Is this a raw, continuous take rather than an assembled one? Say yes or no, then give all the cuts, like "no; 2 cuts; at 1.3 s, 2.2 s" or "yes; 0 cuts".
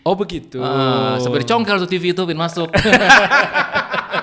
yes; 0 cuts